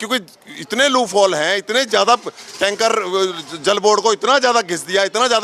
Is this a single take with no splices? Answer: yes; 0 cuts

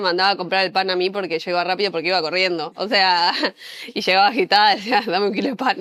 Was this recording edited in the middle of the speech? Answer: no; 0 cuts

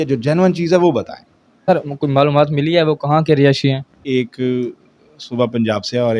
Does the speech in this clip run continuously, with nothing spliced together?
no; 2 cuts; at 1.7 s, 4.0 s

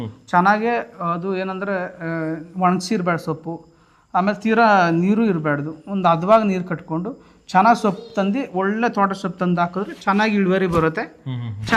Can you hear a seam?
no; 0 cuts

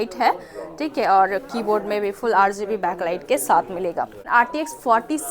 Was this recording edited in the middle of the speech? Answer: yes; 1 cut; at 4.2 s

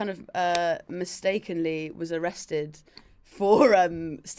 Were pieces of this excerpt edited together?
no; 0 cuts

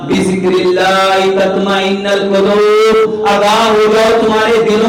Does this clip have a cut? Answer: no; 0 cuts

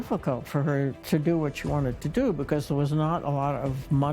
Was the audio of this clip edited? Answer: yes; 1 cut; at 1.0 s

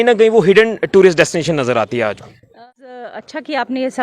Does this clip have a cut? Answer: yes; 1 cut; at 2.4 s

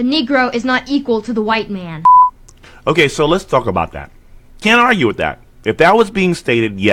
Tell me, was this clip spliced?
no; 0 cuts

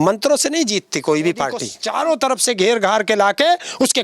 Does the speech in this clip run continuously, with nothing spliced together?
no; 1 cut; at 1.8 s

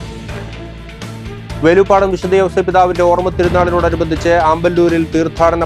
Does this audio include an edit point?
no; 0 cuts

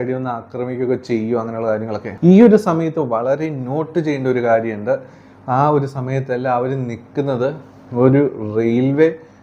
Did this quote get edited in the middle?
yes; 1 cut; at 2.1 s

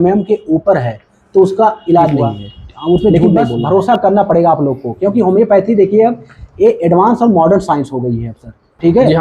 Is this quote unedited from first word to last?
no; 1 cut; at 3.0 s

